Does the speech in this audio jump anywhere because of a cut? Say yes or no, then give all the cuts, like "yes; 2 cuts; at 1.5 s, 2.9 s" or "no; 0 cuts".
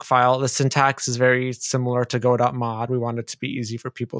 no; 0 cuts